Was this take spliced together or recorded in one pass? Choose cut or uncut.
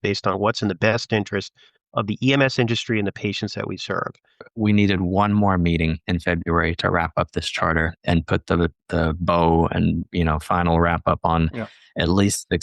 cut